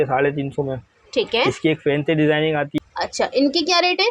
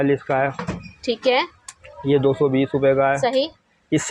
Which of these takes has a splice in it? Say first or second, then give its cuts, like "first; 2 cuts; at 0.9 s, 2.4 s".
first; 1 cut; at 2.7 s